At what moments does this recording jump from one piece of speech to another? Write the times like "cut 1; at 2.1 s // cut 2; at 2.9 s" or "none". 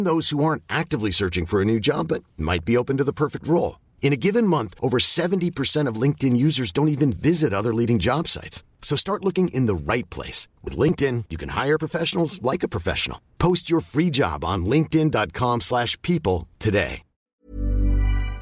cut 1; at 17.4 s